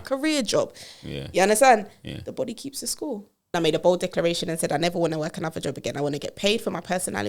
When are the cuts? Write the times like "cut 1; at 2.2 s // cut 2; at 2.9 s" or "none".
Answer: cut 1; at 3.5 s